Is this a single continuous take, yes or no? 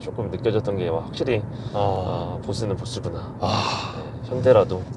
yes